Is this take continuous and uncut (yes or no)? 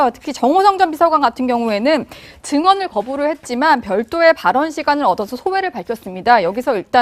no